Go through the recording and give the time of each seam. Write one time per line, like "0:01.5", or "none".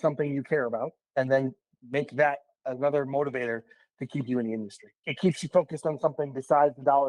0:05.0